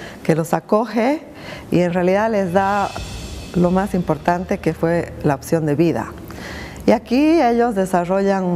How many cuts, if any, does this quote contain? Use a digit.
1